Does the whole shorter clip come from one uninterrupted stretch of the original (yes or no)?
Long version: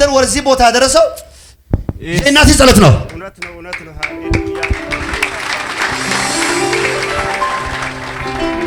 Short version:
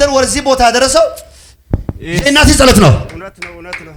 yes